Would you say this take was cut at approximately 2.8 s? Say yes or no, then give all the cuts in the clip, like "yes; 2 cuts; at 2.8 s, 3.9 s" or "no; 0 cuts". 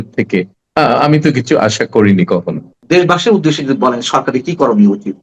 yes; 1 cut; at 2.8 s